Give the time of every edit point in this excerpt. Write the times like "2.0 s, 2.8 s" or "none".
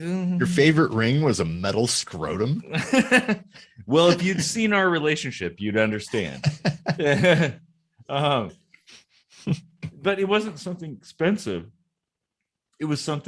none